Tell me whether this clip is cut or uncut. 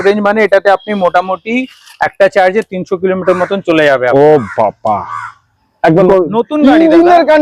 cut